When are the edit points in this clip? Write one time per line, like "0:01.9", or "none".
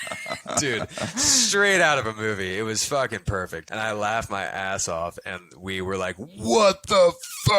0:03.6

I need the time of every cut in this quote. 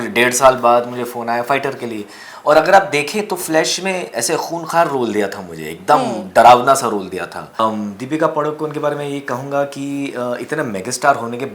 0:07.6

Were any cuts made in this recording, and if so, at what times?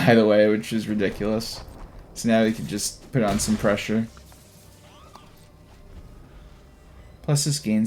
none

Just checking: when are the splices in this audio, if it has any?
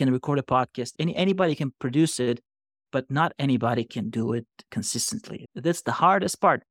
0:00.9
0:05.3

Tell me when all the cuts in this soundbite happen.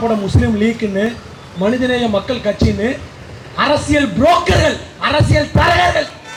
none

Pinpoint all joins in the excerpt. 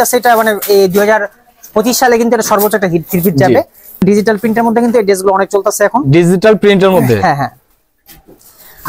0:04.0

